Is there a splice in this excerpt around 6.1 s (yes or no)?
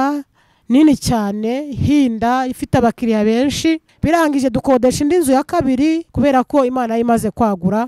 yes